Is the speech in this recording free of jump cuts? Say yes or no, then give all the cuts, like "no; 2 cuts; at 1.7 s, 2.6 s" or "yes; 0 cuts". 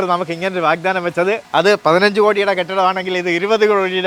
yes; 0 cuts